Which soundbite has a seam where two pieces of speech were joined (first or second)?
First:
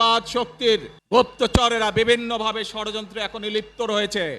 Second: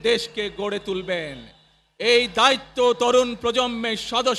first